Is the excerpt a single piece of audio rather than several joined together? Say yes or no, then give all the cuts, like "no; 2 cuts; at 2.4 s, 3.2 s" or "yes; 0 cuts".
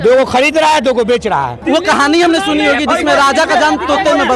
no; 1 cut; at 1.6 s